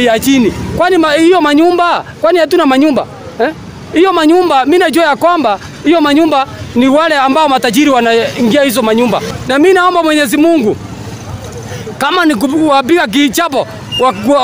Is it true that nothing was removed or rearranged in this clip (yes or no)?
no